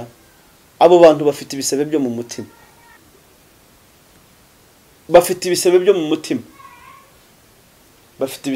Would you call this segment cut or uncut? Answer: cut